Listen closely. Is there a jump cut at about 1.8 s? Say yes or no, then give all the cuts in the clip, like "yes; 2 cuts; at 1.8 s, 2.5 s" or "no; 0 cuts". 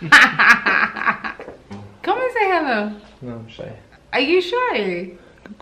yes; 1 cut; at 1.8 s